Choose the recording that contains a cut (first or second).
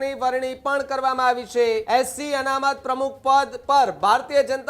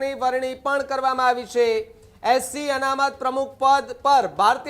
first